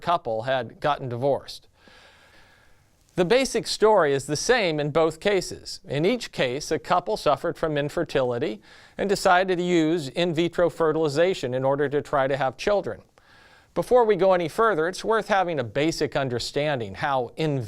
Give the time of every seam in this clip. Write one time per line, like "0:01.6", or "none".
0:01.2